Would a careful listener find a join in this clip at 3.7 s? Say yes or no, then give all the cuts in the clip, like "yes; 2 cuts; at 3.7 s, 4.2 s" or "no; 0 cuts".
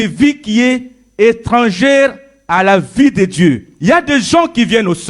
yes; 1 cut; at 3.7 s